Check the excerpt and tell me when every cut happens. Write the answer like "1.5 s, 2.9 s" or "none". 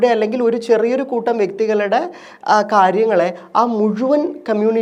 none